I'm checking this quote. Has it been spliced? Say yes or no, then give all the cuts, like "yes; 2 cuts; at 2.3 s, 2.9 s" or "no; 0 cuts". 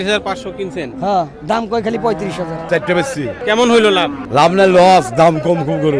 yes; 3 cuts; at 2.6 s, 3.4 s, 4.2 s